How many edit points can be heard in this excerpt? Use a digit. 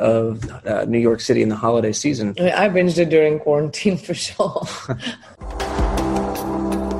2